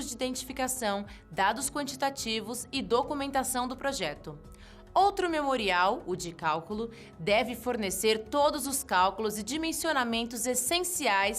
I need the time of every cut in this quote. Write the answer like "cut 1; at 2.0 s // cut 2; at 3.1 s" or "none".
cut 1; at 1.9 s // cut 2; at 8.0 s